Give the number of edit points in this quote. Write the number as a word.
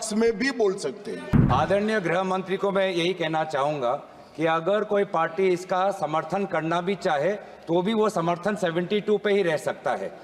one